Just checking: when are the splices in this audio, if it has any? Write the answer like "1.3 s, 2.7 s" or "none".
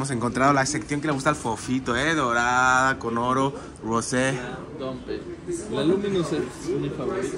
none